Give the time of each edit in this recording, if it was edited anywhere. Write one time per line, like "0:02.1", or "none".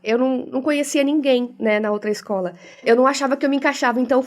0:02.8